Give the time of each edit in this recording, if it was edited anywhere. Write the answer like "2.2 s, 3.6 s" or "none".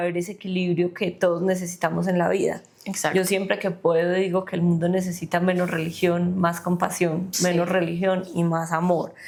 none

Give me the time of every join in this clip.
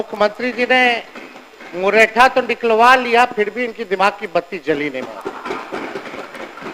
none

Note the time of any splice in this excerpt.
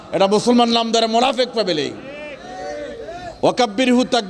none

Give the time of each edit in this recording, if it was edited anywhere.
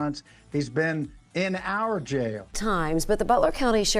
2.5 s

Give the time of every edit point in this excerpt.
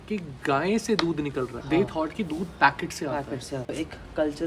1.6 s, 3.7 s

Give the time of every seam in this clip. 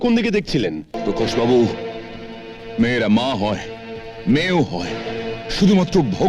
0.9 s

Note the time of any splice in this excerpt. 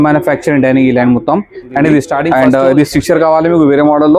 2.3 s

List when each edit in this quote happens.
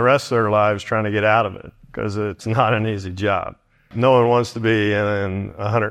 2.4 s, 3.9 s

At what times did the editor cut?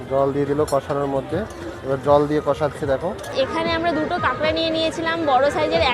3.3 s

